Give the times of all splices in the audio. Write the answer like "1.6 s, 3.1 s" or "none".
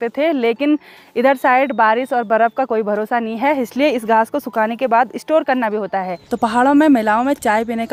none